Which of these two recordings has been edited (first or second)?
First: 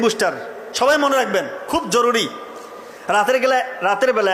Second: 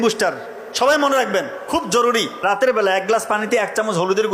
second